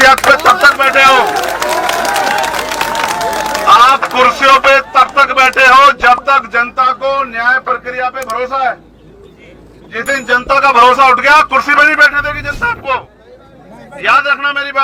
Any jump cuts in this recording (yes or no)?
no